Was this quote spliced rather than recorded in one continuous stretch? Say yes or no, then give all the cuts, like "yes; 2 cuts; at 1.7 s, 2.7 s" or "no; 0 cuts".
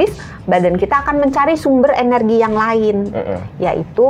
no; 0 cuts